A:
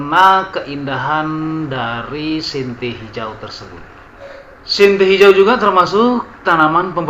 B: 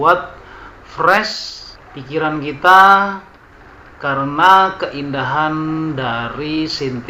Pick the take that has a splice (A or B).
A